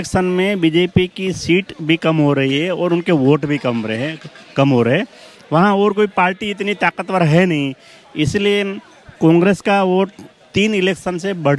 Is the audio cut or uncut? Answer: uncut